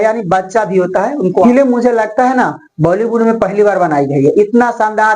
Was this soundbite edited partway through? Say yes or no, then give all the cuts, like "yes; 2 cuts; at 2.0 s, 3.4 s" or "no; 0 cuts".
yes; 1 cut; at 1.3 s